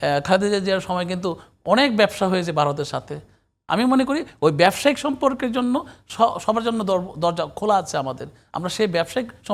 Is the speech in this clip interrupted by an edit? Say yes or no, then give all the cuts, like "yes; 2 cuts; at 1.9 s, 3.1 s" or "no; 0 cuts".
no; 0 cuts